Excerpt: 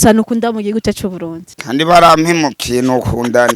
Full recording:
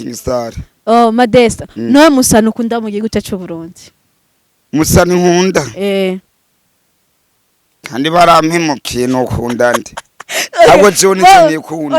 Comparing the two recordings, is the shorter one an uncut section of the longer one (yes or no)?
no